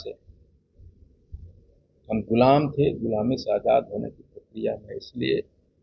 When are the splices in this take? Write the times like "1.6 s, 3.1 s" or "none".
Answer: none